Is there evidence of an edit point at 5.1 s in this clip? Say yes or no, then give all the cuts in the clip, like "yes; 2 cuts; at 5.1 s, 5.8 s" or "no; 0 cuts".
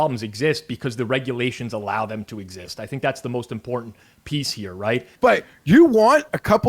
yes; 1 cut; at 5.1 s